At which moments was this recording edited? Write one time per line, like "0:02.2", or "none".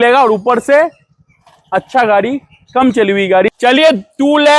0:03.5